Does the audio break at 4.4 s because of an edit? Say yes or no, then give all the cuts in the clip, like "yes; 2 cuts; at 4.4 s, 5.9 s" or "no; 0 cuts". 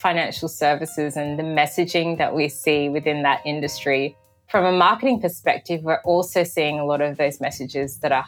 yes; 1 cut; at 4.4 s